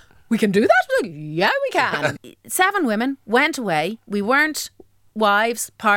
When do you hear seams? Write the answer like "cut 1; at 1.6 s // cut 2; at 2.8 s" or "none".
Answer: cut 1; at 2.2 s // cut 2; at 4.0 s